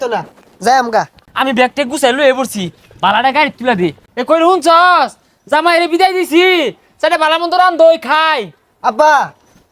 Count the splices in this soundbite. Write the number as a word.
two